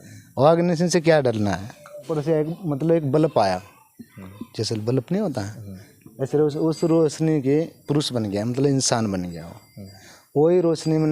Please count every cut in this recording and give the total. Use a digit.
1